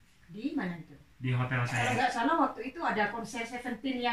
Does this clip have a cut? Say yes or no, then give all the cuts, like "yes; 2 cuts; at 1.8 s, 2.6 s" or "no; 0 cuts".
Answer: yes; 1 cut; at 1.7 s